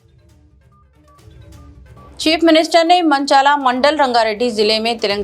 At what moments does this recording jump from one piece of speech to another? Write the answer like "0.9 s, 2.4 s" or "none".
1.6 s